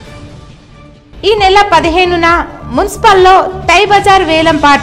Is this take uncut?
no; 1 cut; at 1.0 s

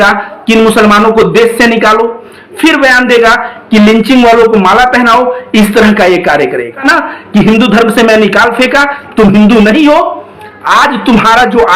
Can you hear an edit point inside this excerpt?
yes; 1 cut; at 6.8 s

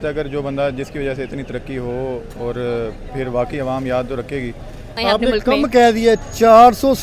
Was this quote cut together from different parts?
yes; 1 cut; at 5.0 s

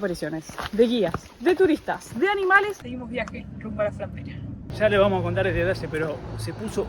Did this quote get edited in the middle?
yes; 2 cuts; at 2.8 s, 4.6 s

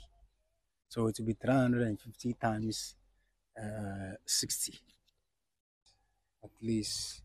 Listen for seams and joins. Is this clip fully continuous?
no; 1 cut; at 5.7 s

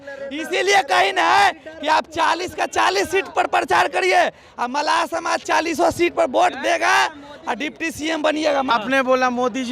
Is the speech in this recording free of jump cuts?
no; 1 cut; at 8.7 s

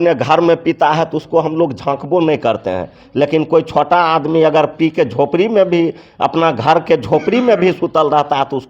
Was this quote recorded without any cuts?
yes; 0 cuts

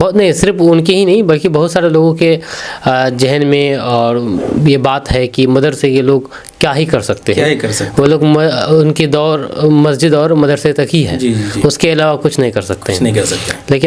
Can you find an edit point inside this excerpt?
no; 0 cuts

